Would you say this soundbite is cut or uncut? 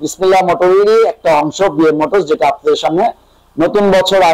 uncut